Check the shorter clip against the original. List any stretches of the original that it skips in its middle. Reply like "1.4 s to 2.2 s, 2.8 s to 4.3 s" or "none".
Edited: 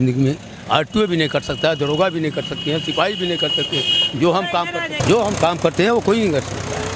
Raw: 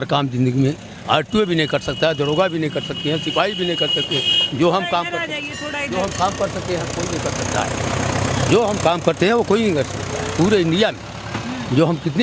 5.4 s to 8.4 s

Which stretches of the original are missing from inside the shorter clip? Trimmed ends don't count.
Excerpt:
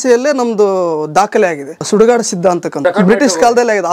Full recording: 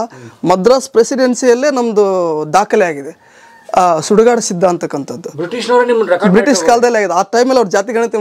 3.2 s to 4.0 s, 5.0 s to 6.1 s

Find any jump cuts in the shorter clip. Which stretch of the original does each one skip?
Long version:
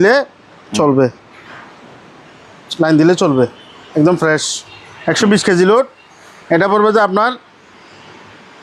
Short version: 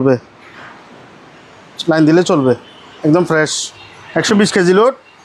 none

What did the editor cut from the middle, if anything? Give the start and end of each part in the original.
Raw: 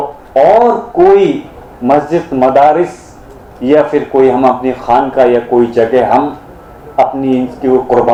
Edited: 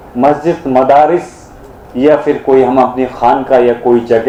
none

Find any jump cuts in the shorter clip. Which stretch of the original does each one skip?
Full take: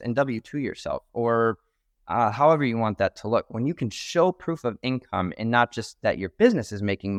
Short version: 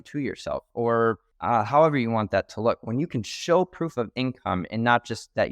1.7 s to 2.0 s

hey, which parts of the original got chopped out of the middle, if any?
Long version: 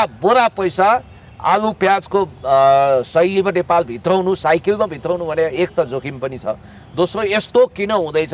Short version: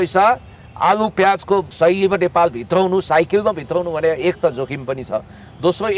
2.4 s to 3.1 s

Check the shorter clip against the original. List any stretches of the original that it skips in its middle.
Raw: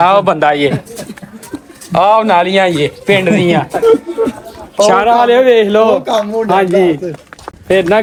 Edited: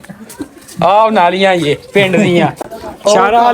3.7 s to 4.3 s

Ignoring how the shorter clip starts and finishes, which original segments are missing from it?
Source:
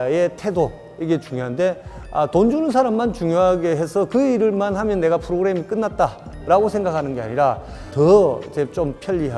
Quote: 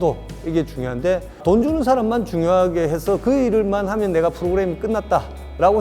2.0 s to 2.3 s

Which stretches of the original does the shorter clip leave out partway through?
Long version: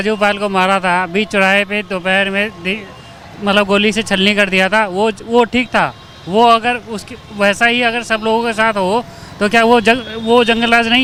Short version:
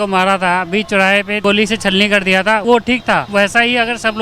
1.8 s to 3.7 s, 5.0 s to 6.8 s

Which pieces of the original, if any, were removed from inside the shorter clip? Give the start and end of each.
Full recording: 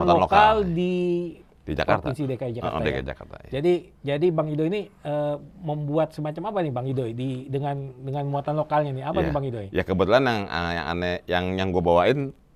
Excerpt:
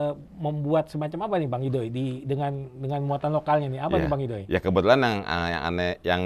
none

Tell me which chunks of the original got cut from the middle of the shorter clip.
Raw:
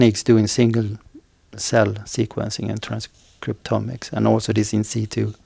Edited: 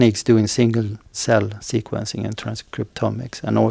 1.0 s to 1.5 s, 3.1 s to 3.3 s

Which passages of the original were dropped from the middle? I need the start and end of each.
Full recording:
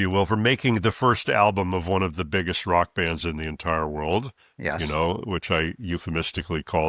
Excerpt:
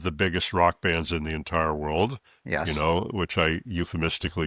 none

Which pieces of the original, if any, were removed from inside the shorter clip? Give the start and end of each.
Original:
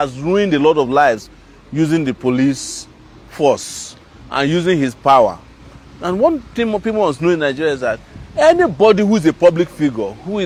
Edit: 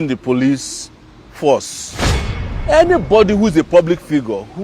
4.3 s to 8.0 s

